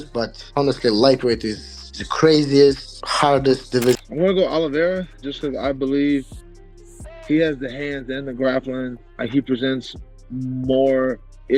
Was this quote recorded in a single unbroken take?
no; 1 cut; at 4.0 s

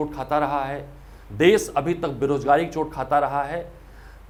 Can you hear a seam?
no; 0 cuts

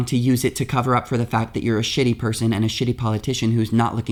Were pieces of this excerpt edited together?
no; 0 cuts

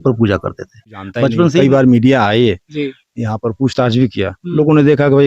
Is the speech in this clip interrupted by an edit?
yes; 1 cut; at 1.6 s

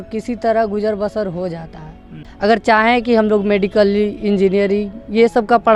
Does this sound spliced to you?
yes; 1 cut; at 2.2 s

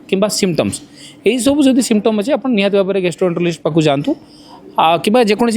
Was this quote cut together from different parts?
no; 0 cuts

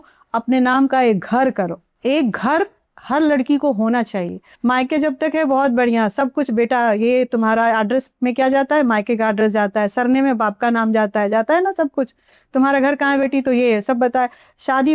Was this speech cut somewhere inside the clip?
yes; 2 cuts; at 1.9 s, 4.4 s

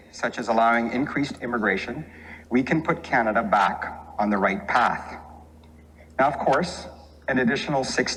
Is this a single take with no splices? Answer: yes; 0 cuts

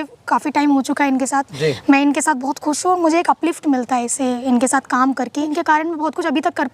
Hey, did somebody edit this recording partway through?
yes; 2 cuts; at 1.5 s, 5.5 s

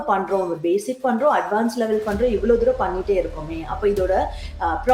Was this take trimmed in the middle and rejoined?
no; 0 cuts

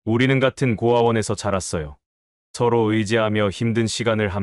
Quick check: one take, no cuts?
yes; 0 cuts

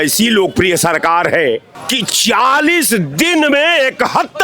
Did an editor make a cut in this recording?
yes; 1 cut; at 1.8 s

